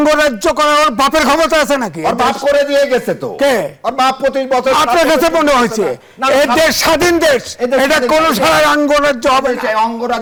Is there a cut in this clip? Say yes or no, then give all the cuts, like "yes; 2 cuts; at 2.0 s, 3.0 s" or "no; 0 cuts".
no; 0 cuts